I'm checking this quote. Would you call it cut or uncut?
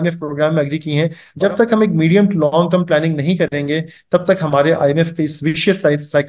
cut